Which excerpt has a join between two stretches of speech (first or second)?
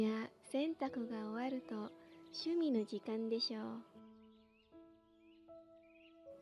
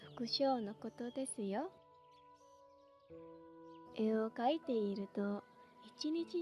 second